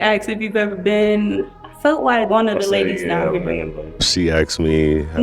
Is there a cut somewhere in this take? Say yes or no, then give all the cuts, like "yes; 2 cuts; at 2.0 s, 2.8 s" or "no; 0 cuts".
no; 0 cuts